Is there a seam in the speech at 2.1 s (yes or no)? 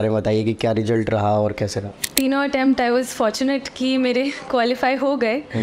yes